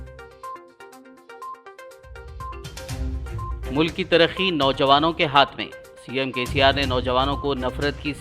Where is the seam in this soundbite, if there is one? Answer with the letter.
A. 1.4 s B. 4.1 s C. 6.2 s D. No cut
D